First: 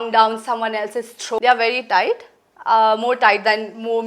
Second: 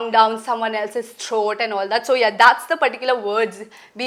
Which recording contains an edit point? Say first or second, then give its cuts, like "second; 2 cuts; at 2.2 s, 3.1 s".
first; 1 cut; at 1.4 s